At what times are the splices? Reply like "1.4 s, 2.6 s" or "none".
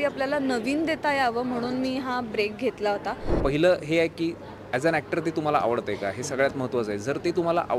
3.4 s

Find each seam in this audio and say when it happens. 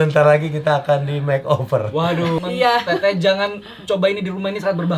2.4 s

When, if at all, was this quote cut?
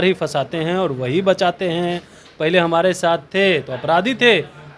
none

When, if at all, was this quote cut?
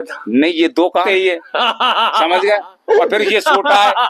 1.0 s

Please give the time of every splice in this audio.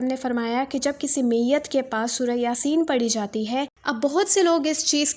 3.8 s

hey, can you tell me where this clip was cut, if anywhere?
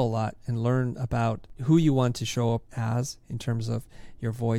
1.5 s, 2.7 s

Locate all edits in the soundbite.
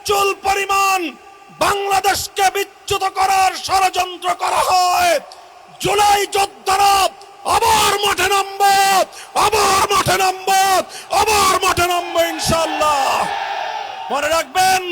14.0 s

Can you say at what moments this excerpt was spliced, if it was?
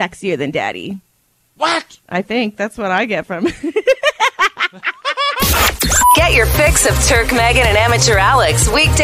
2.0 s, 5.4 s

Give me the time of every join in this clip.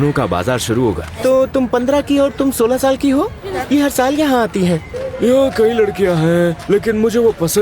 1.1 s, 3.5 s, 5.0 s

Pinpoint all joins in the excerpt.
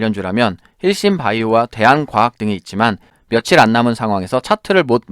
3.1 s

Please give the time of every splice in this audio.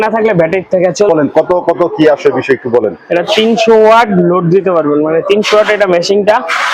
1.1 s

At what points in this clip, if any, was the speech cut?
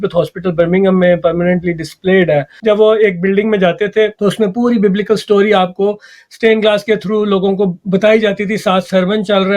2.6 s

